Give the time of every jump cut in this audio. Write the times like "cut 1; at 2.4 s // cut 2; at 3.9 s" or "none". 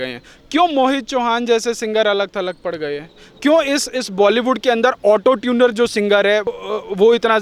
none